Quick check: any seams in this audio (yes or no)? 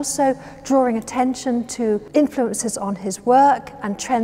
yes